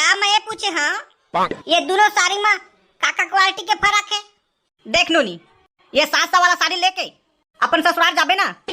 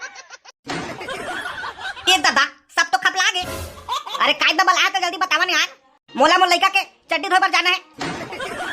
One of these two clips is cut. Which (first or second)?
second